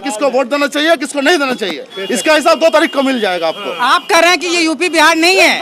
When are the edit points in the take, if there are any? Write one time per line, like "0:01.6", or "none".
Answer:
none